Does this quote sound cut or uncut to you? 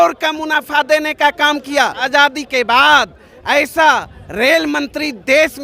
cut